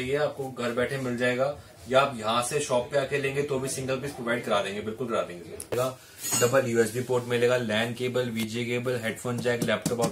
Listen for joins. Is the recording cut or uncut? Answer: cut